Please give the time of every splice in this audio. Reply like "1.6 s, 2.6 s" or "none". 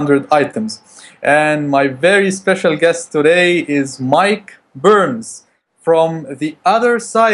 none

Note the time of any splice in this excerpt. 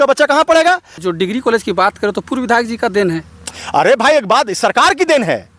1.0 s

